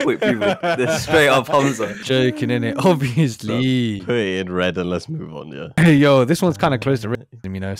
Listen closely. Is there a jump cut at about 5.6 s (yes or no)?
yes